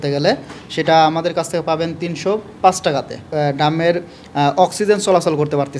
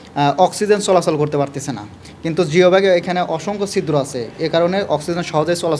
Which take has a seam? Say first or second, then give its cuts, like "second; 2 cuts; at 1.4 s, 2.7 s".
first; 1 cut; at 3.2 s